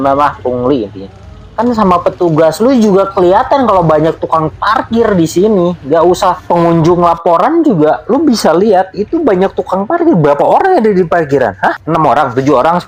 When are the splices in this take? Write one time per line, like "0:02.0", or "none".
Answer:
none